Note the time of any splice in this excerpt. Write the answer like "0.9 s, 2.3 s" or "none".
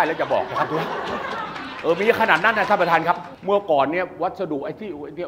none